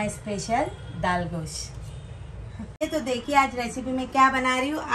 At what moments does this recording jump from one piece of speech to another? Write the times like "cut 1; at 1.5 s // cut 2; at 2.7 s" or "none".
cut 1; at 2.8 s